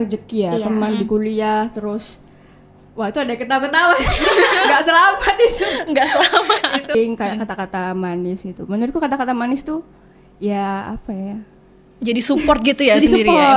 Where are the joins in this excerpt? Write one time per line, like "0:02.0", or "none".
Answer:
0:06.9